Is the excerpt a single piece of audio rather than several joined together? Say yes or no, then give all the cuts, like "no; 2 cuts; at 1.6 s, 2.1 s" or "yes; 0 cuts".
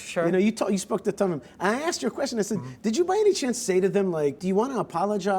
no; 1 cut; at 4.4 s